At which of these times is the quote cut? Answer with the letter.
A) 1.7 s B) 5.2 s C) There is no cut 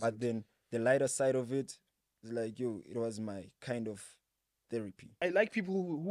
B